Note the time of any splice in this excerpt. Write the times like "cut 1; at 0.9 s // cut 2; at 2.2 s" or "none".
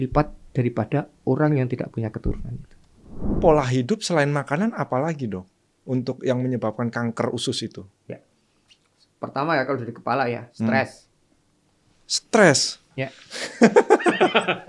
cut 1; at 3.4 s